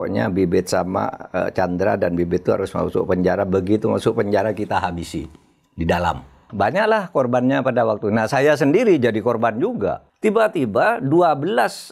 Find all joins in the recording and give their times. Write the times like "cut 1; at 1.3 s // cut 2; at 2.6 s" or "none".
cut 1; at 6.5 s // cut 2; at 10.1 s